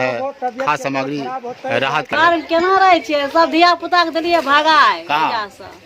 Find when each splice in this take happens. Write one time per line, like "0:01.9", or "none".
0:02.1